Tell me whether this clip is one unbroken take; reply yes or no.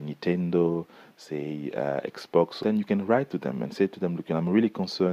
no